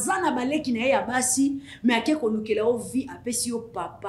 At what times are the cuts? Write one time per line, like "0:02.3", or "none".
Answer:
none